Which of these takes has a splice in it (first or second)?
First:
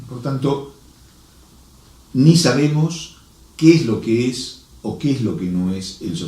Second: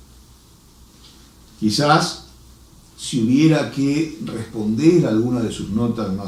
first